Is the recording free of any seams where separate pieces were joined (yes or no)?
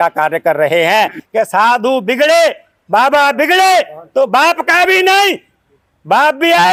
yes